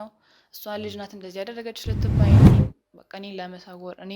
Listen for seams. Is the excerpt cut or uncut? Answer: cut